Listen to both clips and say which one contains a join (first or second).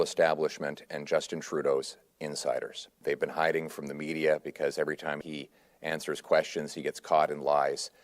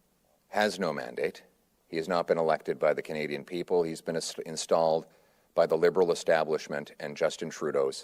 first